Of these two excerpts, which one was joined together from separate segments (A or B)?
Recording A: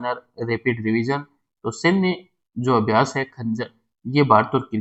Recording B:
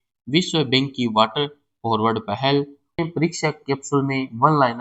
B